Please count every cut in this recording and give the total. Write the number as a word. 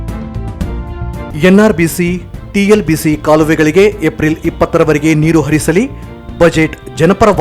one